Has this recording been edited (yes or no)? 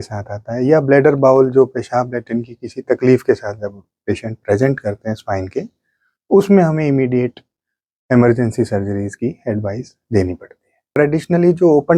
yes